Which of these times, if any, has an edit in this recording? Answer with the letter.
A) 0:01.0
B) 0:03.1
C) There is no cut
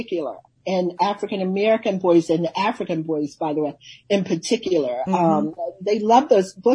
A